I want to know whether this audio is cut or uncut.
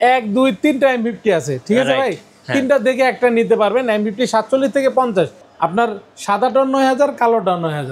cut